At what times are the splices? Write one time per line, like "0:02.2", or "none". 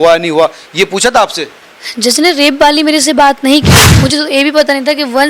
0:03.8

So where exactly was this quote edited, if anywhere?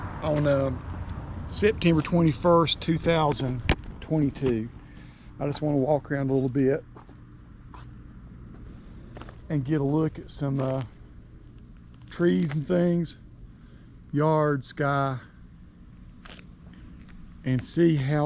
none

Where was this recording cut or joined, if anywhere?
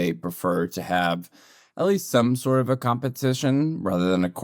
none

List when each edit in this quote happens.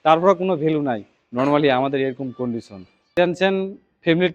0:03.1

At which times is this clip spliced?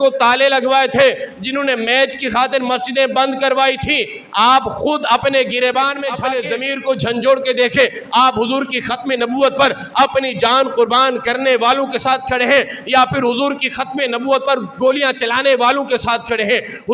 0:06.1

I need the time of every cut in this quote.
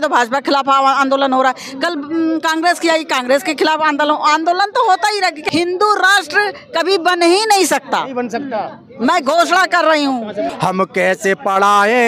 0:05.4
0:10.5

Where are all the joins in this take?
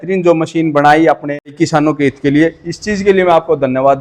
0:01.5

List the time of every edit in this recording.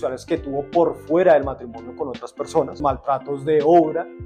0:02.8

